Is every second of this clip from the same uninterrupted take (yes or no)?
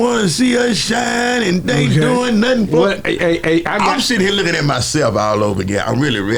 yes